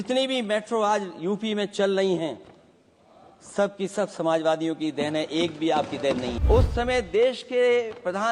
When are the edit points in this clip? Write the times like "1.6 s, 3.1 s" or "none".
6.4 s